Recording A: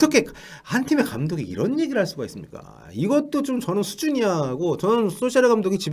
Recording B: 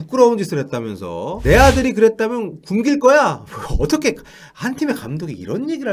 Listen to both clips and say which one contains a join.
B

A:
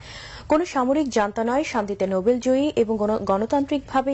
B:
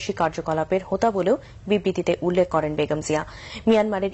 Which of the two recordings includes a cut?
A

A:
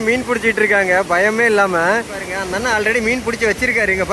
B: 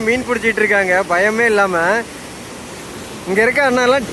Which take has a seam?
A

